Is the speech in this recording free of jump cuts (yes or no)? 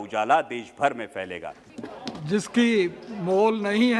no